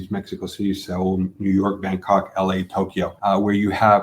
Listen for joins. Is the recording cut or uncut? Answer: cut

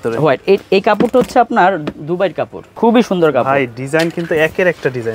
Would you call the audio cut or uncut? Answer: cut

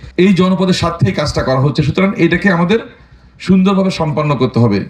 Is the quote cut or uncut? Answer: uncut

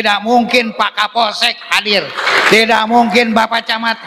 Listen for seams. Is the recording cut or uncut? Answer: uncut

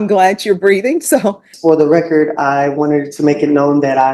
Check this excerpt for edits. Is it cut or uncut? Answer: cut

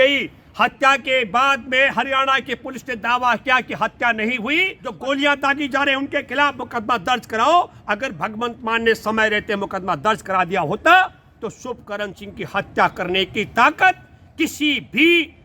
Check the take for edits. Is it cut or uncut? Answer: cut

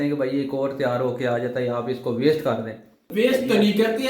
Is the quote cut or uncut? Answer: cut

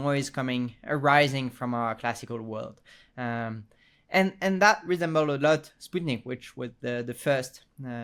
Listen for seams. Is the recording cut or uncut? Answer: uncut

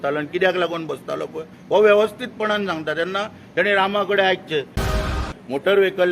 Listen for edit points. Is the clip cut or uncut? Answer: cut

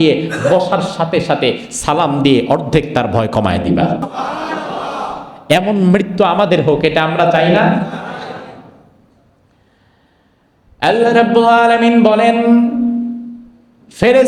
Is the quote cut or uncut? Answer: cut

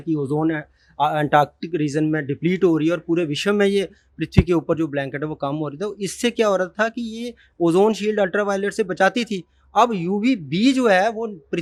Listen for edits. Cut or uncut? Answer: uncut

